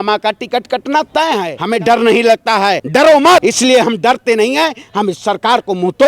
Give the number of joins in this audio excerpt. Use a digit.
3